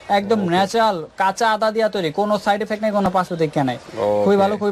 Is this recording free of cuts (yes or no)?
yes